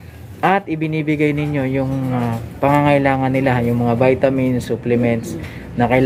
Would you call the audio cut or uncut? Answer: uncut